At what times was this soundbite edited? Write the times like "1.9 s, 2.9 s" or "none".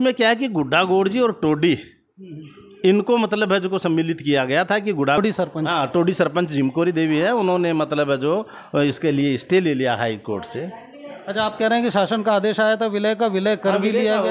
5.2 s

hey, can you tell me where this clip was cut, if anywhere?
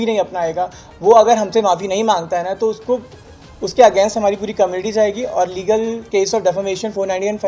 none

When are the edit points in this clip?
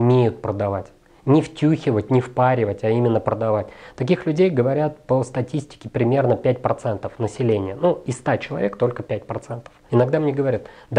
9.7 s

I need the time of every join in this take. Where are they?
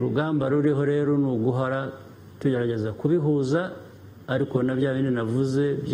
none

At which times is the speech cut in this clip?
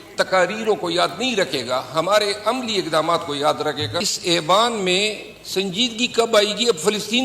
4.0 s

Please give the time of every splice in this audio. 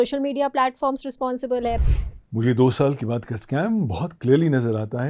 1.8 s

